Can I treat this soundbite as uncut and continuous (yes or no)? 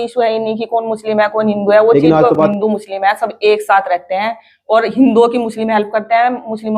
no